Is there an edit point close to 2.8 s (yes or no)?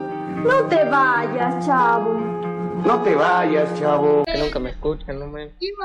no